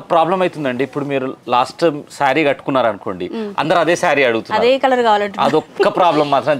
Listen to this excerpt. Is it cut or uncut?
uncut